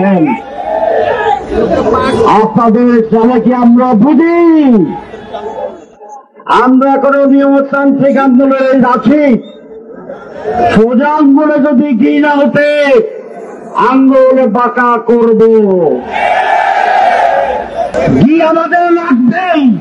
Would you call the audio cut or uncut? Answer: cut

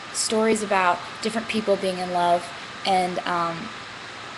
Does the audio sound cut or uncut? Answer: uncut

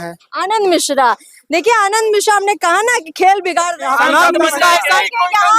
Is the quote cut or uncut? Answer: cut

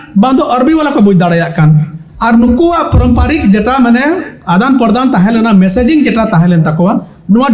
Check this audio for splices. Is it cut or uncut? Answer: uncut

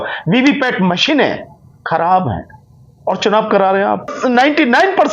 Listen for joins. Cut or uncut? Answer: cut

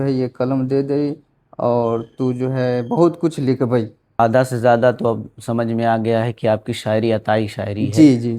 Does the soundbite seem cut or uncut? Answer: cut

